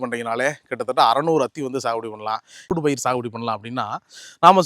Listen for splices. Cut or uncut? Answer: cut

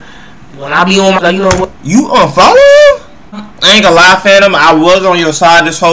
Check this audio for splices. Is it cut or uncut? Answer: cut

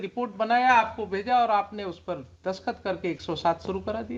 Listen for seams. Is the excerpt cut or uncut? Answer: uncut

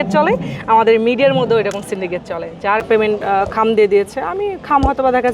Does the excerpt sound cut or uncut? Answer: cut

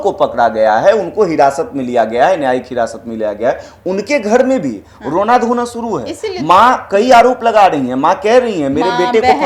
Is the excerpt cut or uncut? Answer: uncut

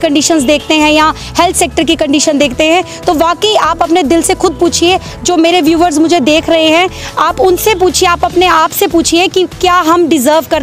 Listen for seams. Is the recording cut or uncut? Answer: uncut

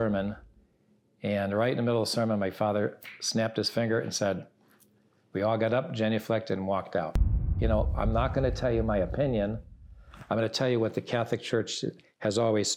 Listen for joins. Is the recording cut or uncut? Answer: cut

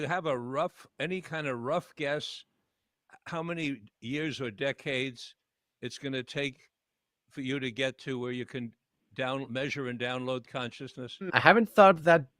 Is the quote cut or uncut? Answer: cut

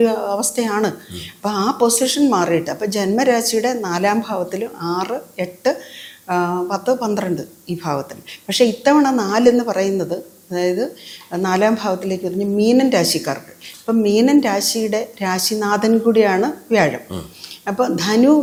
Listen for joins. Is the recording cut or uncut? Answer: uncut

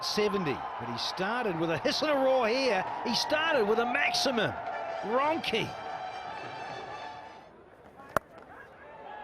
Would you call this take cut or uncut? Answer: cut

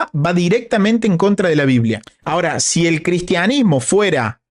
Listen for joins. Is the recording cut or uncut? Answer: cut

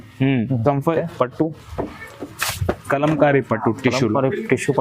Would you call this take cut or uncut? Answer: cut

